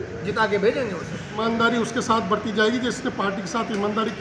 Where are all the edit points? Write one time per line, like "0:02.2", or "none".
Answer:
0:01.4